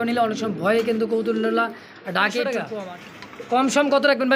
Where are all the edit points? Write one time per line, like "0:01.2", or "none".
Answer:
0:02.7